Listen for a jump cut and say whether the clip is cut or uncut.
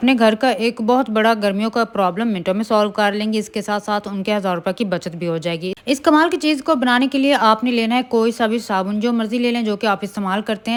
uncut